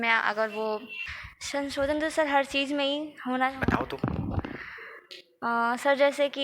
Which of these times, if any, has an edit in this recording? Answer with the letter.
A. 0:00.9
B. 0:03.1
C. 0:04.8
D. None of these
A